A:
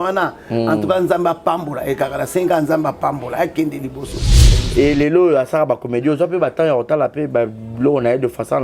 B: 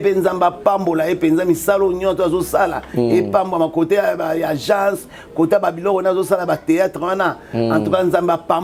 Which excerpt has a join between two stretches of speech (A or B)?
A